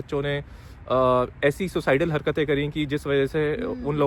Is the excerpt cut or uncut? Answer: uncut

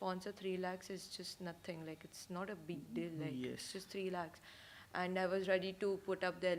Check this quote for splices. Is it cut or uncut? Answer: uncut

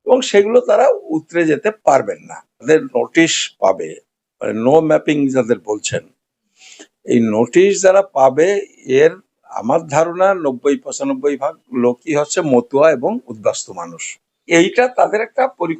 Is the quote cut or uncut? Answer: cut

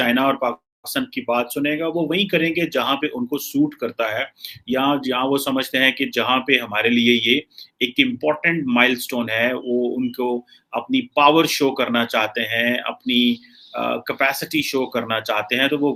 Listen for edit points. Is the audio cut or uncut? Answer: uncut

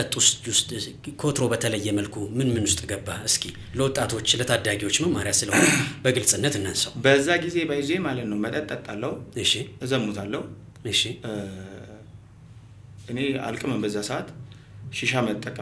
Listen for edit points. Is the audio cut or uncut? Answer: uncut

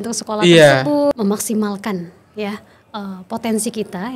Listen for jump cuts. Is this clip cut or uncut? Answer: cut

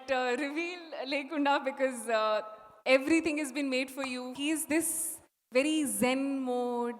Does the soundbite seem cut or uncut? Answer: cut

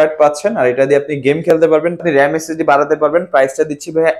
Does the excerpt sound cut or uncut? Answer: cut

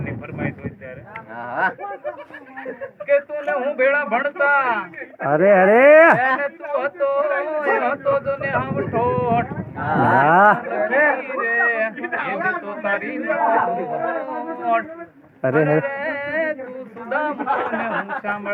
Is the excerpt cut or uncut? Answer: uncut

